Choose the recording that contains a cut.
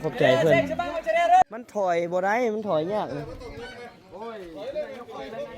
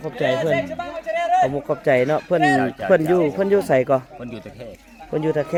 first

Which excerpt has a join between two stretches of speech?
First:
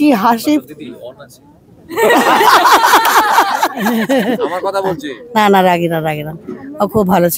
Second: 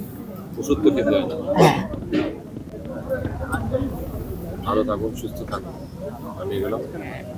first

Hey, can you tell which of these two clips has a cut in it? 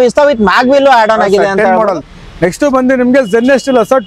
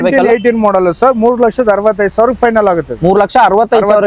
first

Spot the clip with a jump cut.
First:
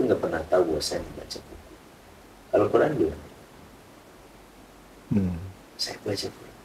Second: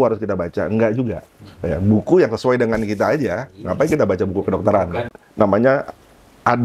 second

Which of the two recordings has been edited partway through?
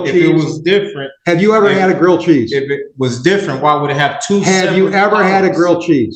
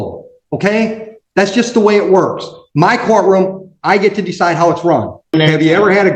second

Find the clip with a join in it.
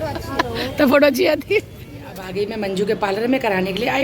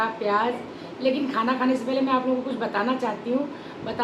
first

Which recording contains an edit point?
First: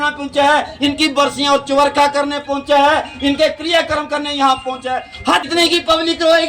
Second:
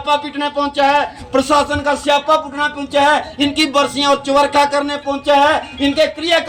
first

